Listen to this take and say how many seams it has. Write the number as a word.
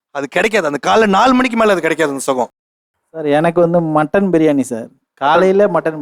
zero